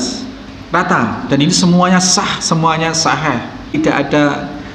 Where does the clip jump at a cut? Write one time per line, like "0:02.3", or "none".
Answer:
0:03.7

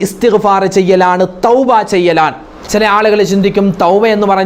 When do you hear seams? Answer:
0:02.6

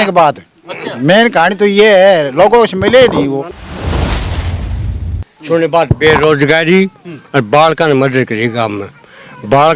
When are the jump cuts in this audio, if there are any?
0:03.6
0:05.2

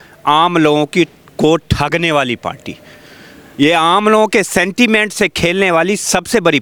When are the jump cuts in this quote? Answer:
none

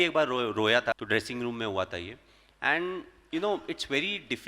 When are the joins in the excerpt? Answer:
0:00.9

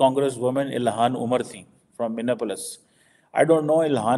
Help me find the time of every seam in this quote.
none

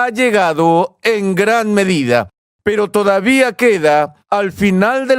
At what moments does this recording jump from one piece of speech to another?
0:02.4
0:04.2

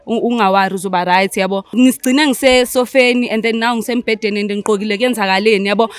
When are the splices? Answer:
0:01.7

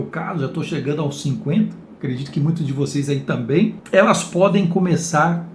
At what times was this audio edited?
0:03.8

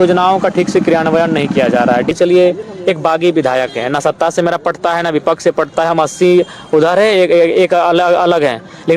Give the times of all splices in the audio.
0:02.1

